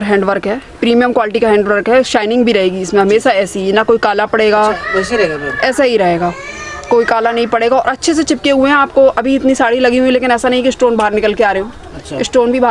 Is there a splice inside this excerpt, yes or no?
no